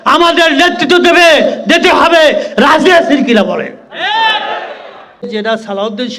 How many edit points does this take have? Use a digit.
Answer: 1